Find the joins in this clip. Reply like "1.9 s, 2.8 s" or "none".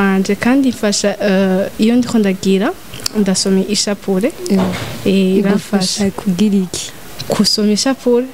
none